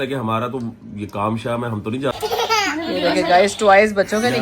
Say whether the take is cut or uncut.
cut